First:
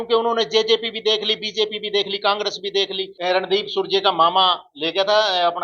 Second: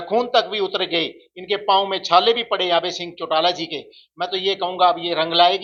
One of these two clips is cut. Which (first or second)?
first